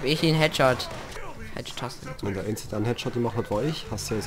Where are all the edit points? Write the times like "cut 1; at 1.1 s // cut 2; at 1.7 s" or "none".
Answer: cut 1; at 1.1 s